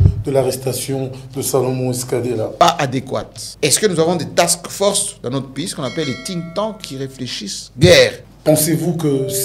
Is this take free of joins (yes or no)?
no